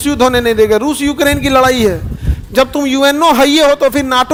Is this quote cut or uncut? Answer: uncut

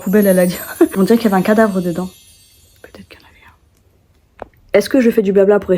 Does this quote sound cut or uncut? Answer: cut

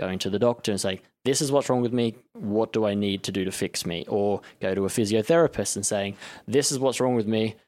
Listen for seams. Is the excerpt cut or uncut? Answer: uncut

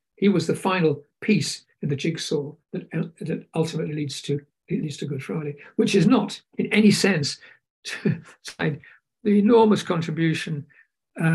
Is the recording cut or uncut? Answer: uncut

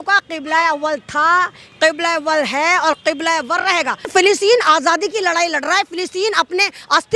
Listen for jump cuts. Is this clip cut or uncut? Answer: cut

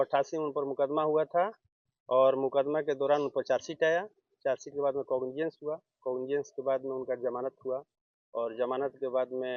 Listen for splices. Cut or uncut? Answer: uncut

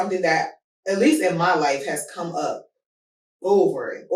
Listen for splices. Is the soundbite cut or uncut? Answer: uncut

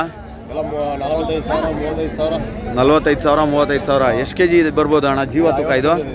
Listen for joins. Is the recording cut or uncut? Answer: uncut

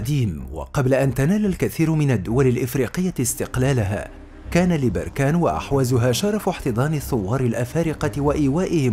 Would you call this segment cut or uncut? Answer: uncut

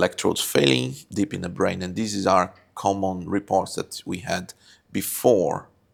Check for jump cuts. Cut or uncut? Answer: uncut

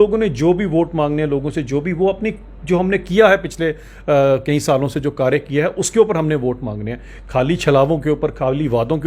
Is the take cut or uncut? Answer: uncut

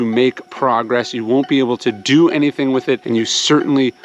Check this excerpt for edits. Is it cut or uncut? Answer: uncut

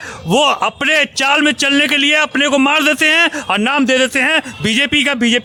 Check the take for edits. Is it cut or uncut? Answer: uncut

